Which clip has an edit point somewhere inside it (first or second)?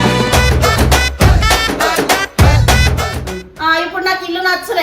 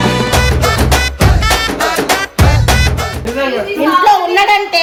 first